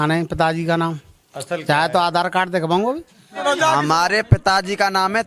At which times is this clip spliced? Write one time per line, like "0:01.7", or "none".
0:03.4